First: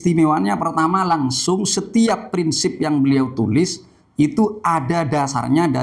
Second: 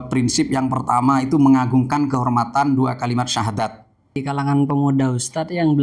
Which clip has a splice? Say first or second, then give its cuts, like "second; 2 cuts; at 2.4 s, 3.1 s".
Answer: second; 1 cut; at 4.3 s